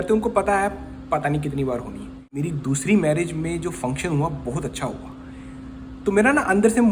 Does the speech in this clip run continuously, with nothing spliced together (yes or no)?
no